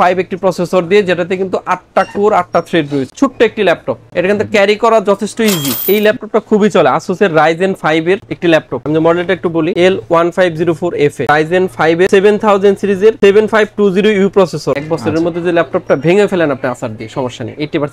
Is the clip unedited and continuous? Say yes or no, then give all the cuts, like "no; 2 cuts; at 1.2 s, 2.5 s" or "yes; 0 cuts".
no; 4 cuts; at 3.1 s, 5.8 s, 11.2 s, 14.7 s